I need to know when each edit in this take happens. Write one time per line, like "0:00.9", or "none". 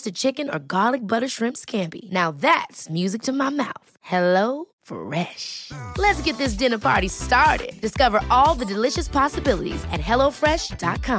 none